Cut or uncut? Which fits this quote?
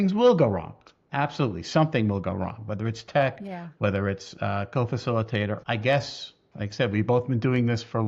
cut